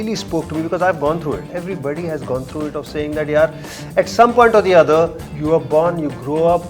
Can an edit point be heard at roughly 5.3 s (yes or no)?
yes